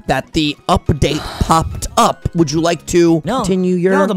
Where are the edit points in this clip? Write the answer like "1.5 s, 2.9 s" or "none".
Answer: 3.3 s